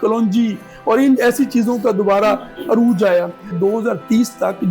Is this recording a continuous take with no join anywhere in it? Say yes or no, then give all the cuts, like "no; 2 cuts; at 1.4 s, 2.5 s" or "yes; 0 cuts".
no; 1 cut; at 3.5 s